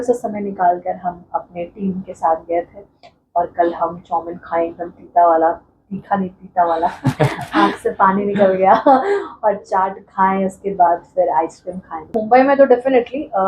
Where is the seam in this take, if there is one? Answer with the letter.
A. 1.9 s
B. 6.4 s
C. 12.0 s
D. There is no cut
C